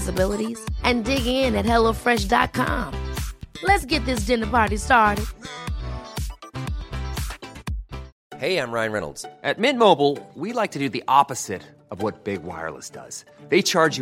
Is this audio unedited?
no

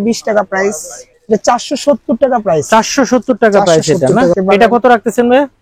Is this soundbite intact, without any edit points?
no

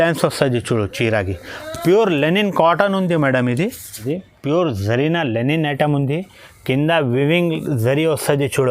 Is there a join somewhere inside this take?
yes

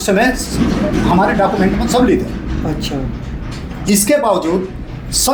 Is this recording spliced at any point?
no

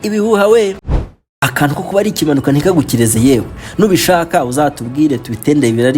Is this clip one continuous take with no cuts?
no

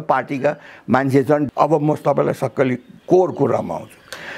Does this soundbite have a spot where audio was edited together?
yes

